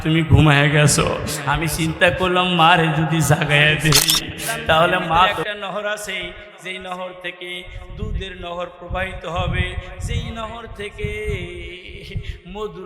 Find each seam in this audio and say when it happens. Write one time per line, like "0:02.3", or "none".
0:05.4